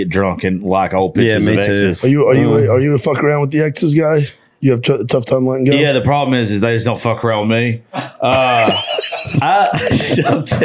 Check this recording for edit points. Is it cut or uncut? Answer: cut